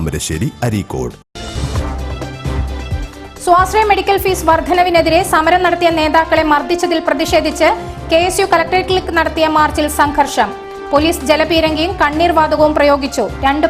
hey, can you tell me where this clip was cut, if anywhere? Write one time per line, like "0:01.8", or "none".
0:01.3
0:03.1